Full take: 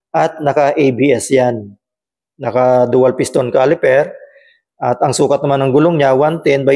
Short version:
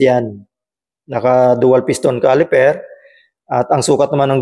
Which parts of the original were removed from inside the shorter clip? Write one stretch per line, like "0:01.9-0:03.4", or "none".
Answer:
none